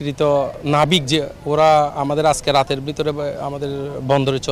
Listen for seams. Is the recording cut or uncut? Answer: uncut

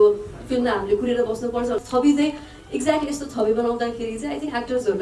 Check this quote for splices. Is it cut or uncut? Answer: cut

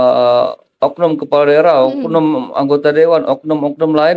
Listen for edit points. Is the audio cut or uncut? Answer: uncut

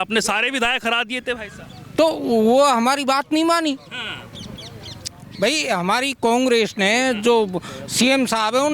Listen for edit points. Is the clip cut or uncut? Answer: uncut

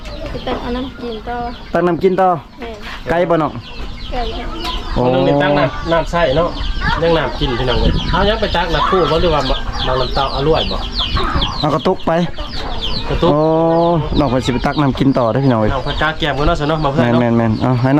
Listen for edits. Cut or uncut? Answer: uncut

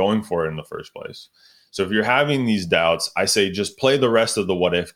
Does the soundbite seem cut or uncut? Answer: uncut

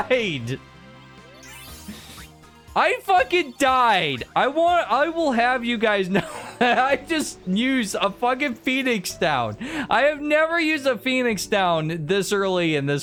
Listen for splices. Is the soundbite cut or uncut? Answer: uncut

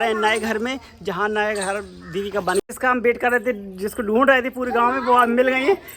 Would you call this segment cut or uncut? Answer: cut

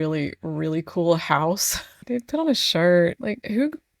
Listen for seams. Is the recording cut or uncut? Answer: cut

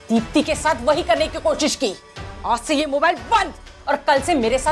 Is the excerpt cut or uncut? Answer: uncut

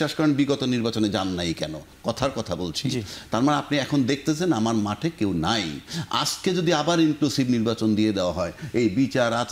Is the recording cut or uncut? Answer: uncut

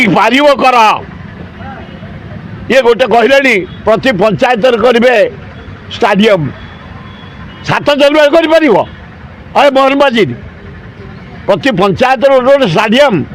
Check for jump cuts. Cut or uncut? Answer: uncut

